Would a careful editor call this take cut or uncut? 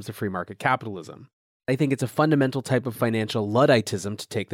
cut